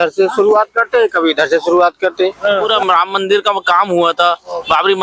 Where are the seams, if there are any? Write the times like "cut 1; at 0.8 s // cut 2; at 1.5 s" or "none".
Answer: cut 1; at 2.7 s